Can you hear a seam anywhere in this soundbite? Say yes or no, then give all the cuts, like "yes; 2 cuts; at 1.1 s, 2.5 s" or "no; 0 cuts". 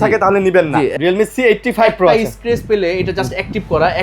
yes; 1 cut; at 0.9 s